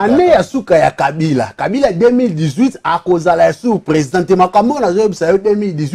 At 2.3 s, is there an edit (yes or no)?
no